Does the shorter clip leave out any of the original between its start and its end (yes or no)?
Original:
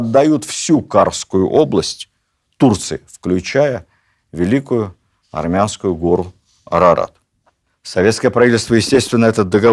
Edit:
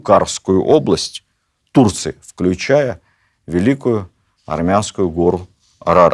no